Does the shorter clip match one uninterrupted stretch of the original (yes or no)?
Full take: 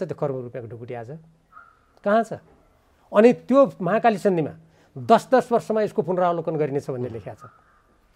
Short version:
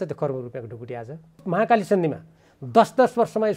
no